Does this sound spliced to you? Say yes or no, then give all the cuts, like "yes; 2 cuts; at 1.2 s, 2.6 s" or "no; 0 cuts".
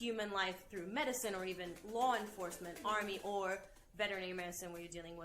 no; 0 cuts